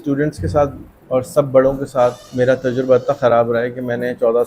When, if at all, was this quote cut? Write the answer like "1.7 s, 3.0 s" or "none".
none